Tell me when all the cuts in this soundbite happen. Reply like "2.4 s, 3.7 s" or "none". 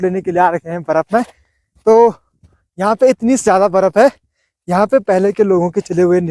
none